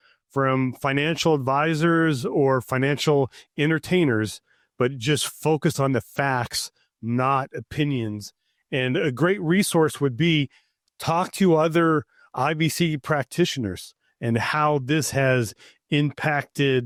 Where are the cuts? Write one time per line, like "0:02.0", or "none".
none